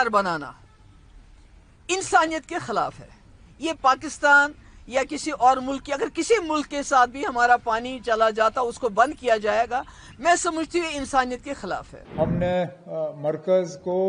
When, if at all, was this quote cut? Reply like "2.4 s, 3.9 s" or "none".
12.0 s